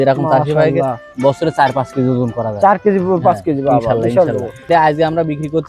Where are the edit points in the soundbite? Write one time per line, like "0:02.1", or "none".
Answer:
0:01.0
0:04.7